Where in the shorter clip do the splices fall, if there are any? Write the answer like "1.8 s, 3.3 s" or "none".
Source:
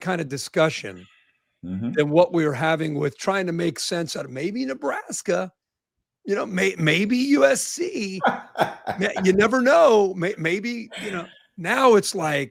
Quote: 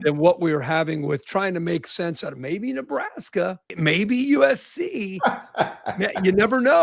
3.8 s